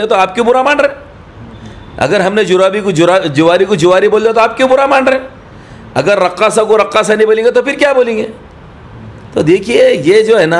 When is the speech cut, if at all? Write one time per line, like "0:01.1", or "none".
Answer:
none